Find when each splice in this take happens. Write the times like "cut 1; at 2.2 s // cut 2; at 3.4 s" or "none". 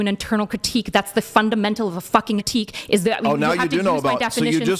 cut 1; at 2.4 s

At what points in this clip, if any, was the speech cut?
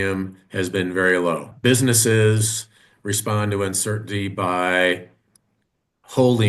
cut 1; at 1.5 s

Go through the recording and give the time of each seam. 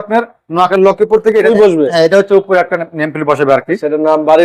cut 1; at 1.4 s

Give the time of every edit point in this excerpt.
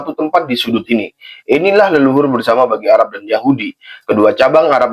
none

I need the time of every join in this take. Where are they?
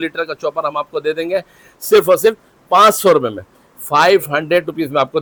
none

